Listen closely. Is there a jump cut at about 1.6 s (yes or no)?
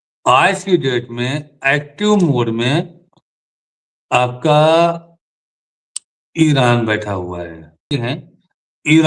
no